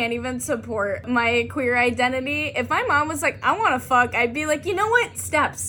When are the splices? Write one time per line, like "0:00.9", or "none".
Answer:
0:01.0